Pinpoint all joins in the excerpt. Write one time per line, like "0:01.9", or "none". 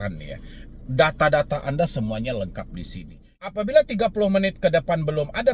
0:03.5